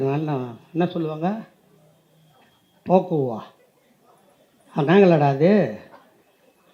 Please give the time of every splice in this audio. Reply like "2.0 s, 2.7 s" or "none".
none